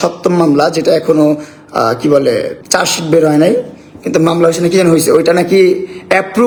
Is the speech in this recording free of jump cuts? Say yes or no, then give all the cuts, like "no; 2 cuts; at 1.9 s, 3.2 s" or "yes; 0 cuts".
yes; 0 cuts